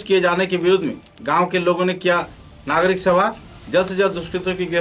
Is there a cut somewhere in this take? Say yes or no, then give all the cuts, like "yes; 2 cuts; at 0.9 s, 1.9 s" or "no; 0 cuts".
no; 0 cuts